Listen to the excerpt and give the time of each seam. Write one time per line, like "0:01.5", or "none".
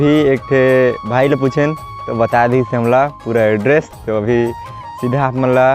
none